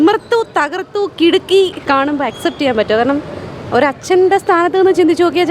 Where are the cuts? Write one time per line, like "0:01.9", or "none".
0:01.9